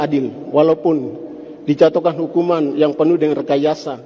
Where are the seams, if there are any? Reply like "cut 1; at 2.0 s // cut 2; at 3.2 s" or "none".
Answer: none

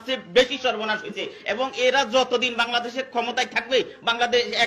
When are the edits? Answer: none

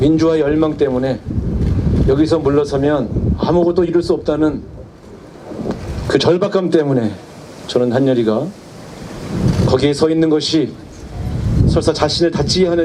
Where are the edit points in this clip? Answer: none

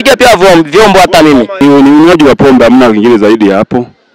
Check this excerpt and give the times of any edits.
cut 1; at 1.6 s

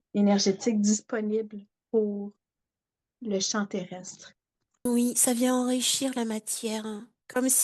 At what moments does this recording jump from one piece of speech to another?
cut 1; at 4.9 s

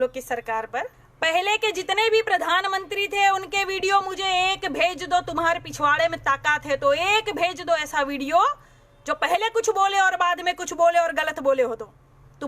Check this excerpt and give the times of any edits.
cut 1; at 1.0 s

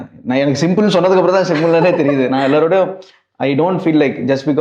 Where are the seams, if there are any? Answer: none

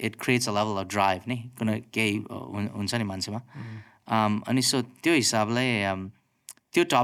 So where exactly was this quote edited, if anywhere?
none

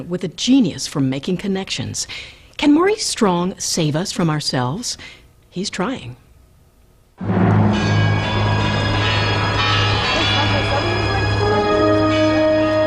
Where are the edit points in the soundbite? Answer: cut 1; at 5.5 s

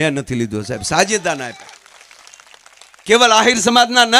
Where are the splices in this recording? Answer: none

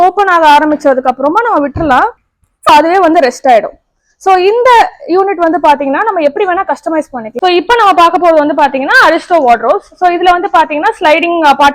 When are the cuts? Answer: cut 1; at 2.7 s // cut 2; at 7.3 s

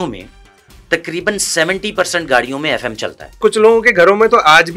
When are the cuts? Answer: cut 1; at 3.4 s

